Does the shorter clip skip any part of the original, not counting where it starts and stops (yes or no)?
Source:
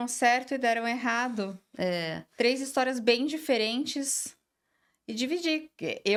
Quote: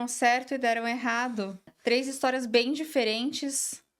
yes